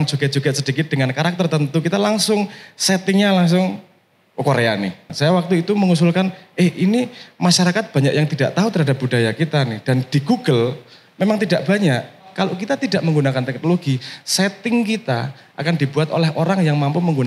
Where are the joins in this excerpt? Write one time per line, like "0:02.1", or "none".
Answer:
0:05.1
0:12.3